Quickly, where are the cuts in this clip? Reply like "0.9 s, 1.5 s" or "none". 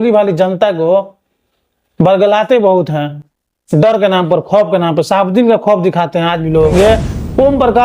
6.7 s